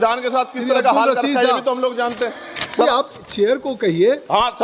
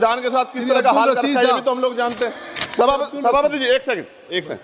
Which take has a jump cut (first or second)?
first